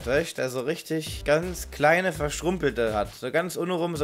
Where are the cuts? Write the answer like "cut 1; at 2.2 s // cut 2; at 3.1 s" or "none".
cut 1; at 1.1 s